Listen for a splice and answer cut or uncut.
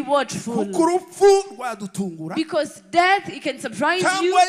uncut